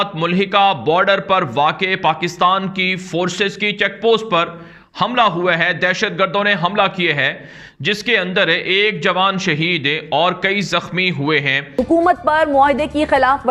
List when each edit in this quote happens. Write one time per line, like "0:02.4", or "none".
0:11.7